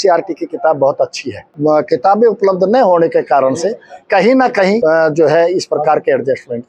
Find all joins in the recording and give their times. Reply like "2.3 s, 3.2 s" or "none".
1.5 s, 4.8 s